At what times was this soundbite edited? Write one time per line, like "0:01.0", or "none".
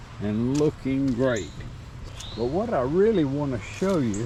none

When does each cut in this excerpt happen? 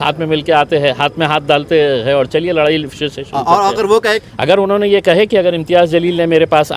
0:04.2

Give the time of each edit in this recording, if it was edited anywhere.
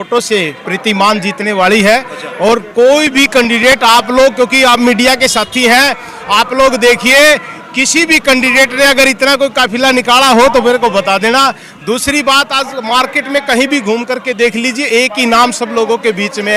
none

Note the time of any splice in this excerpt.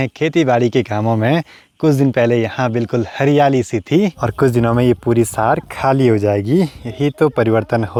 none

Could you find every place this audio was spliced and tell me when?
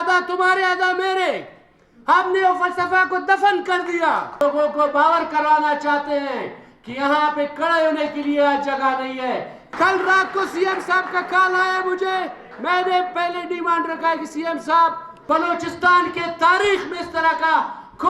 0:04.4
0:09.6
0:15.1

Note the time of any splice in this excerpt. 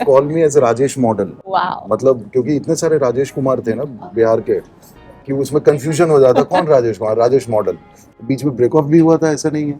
0:08.1

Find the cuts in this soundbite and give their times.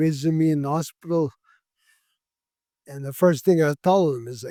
none

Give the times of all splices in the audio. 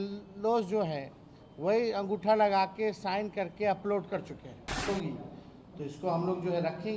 0:04.8

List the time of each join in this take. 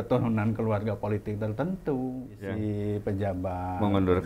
0:02.5

